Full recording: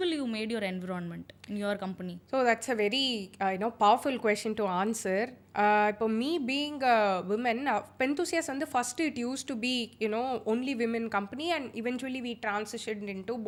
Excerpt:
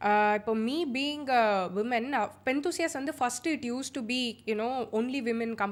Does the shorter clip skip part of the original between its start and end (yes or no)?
no